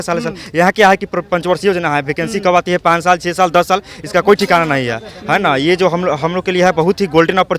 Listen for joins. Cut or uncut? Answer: uncut